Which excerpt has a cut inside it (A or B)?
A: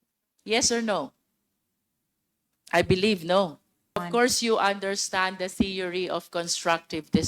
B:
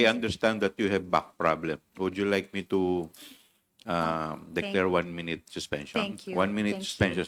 A